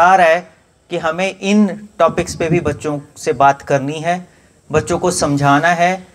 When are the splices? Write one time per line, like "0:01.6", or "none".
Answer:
none